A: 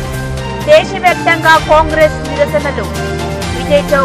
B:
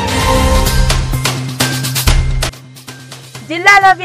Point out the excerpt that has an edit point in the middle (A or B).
B